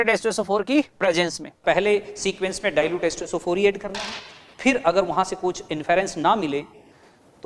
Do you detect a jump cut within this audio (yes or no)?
yes